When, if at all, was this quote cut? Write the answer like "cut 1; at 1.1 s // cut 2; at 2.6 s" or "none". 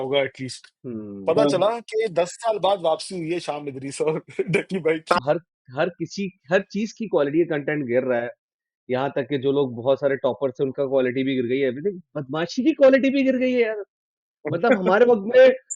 cut 1; at 5.2 s